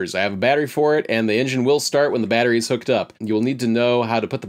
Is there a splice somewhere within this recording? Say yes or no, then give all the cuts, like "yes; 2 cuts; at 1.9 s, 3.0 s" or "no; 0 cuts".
yes; 1 cut; at 3.1 s